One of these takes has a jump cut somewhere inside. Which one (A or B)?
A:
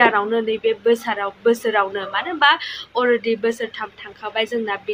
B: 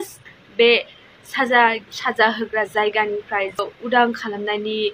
B